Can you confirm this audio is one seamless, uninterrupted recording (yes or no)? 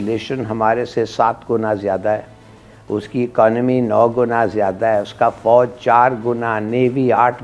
yes